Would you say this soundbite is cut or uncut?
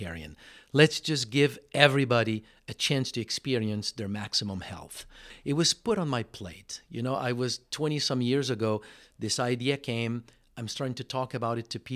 cut